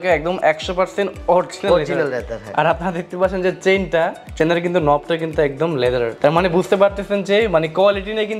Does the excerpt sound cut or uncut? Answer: uncut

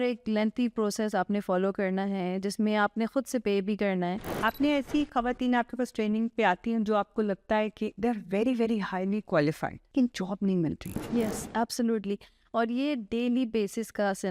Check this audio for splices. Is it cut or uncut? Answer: cut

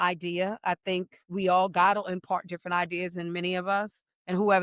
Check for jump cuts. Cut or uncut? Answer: uncut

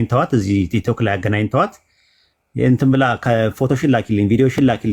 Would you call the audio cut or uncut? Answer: uncut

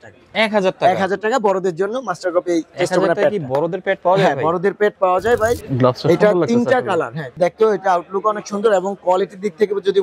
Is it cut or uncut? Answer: cut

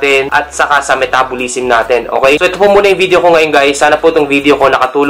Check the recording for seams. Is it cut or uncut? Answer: uncut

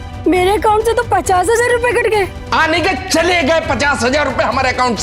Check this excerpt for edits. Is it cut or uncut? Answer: cut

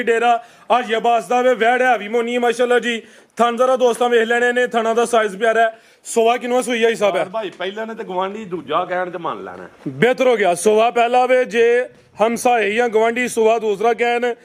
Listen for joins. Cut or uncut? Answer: uncut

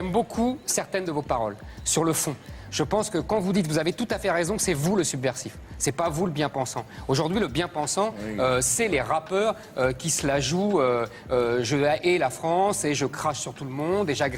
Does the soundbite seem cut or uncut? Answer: uncut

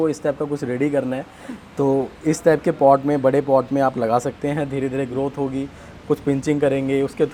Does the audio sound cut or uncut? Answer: uncut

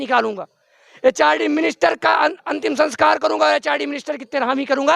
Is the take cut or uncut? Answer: uncut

